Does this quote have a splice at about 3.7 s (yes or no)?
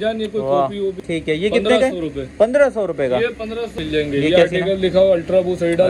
yes